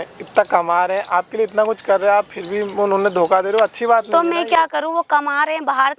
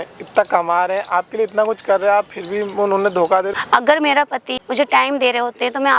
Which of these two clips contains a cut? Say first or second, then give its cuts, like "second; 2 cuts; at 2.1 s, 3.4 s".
second; 2 cuts; at 3.5 s, 4.5 s